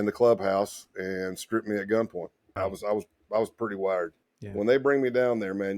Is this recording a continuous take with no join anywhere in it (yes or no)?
no